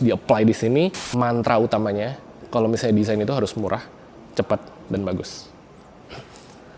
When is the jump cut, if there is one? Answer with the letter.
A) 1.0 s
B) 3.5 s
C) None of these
A